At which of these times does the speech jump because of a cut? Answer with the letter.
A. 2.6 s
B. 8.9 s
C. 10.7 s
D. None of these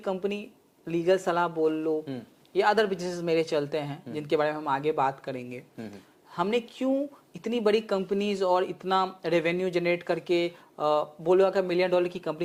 D